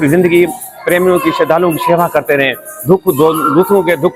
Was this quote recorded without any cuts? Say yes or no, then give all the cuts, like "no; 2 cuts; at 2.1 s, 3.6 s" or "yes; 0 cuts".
yes; 0 cuts